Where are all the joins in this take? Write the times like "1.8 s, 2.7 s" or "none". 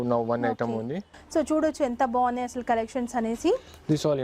1.1 s

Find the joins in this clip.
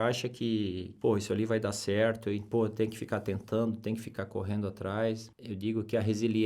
0.9 s, 2.4 s, 5.3 s

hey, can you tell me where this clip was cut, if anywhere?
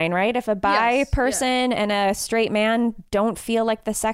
none

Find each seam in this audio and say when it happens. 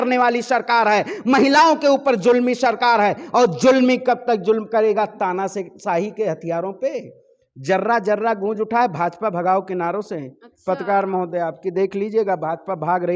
none

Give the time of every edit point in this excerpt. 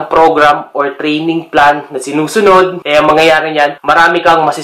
2.8 s, 3.8 s

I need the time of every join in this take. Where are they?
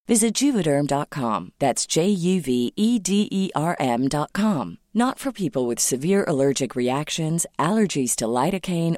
none

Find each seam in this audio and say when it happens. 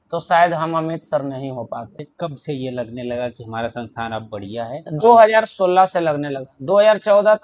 2.0 s

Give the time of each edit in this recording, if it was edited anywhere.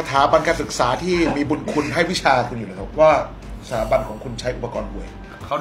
none

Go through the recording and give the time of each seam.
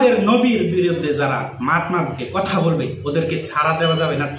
none

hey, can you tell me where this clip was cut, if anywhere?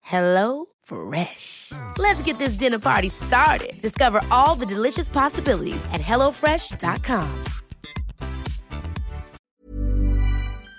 9.4 s

